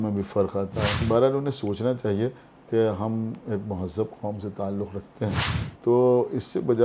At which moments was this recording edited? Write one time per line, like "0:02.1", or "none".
0:01.0
0:05.6